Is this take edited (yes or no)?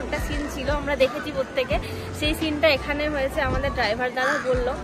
no